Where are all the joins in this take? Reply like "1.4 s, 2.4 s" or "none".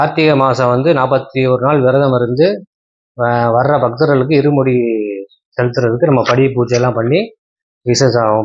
none